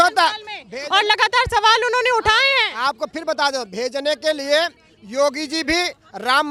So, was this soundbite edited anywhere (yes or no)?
no